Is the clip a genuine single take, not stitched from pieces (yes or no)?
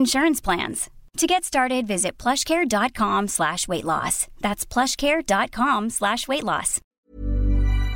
no